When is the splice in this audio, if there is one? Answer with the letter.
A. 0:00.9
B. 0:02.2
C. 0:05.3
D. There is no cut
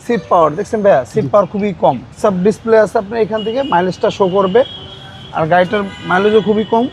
B